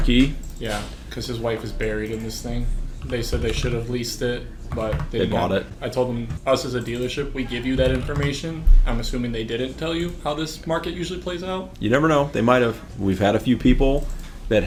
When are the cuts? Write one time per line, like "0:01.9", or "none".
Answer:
none